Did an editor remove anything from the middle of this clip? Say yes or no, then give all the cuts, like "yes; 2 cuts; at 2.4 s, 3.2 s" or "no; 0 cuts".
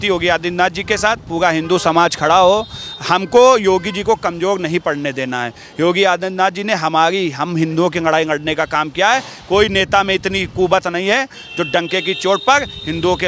no; 0 cuts